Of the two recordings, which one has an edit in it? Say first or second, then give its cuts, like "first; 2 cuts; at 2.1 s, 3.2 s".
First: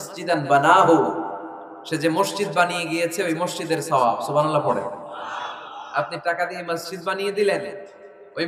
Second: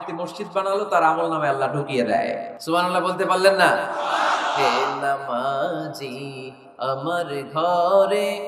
second; 1 cut; at 2.5 s